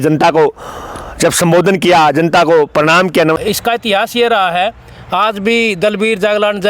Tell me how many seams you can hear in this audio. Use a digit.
1